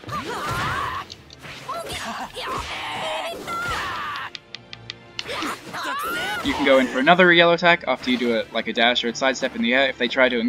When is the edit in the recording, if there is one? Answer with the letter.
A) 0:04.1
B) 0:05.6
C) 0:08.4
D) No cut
D